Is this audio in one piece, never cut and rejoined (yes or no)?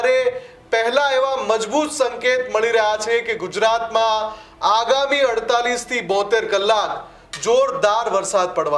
yes